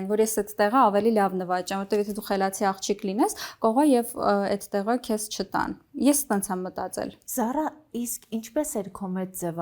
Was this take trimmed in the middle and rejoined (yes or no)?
no